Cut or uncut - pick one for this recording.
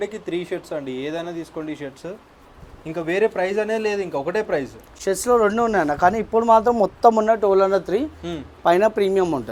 uncut